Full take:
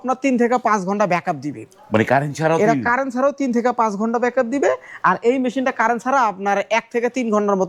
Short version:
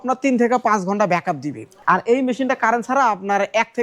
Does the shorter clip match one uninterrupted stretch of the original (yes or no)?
no